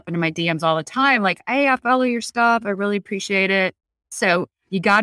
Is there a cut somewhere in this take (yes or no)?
yes